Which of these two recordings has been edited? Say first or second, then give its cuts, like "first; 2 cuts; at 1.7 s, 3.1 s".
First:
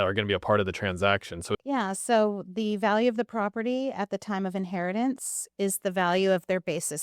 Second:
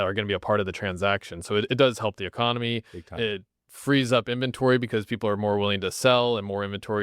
first; 1 cut; at 1.5 s